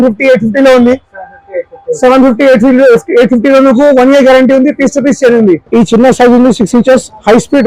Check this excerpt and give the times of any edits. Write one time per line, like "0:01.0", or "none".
0:05.6